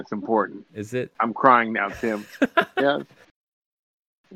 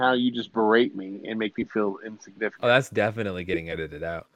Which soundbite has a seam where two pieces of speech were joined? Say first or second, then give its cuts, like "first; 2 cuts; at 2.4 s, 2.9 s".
second; 1 cut; at 2.5 s